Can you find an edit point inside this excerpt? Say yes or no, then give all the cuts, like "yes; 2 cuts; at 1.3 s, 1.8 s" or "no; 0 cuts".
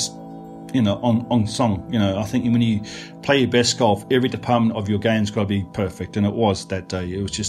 no; 0 cuts